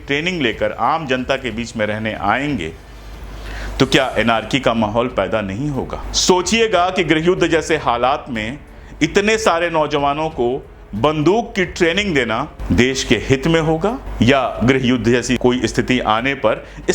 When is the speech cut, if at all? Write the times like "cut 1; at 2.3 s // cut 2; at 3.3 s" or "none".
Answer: cut 1; at 6.1 s // cut 2; at 12.5 s // cut 3; at 14.0 s // cut 4; at 15.4 s